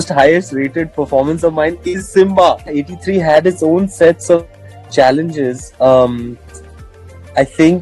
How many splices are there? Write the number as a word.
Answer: one